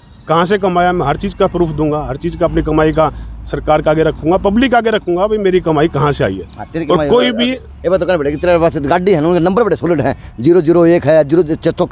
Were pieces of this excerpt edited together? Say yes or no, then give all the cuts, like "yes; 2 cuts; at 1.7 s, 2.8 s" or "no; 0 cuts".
no; 0 cuts